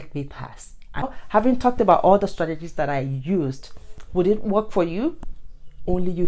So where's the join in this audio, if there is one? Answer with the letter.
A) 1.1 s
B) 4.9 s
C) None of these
A